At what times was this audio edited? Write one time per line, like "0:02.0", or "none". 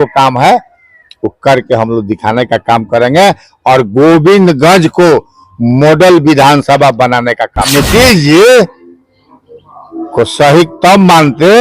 0:07.7